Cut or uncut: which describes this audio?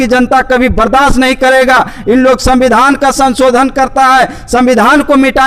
uncut